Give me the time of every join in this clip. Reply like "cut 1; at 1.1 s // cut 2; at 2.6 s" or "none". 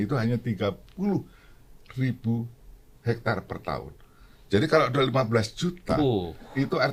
none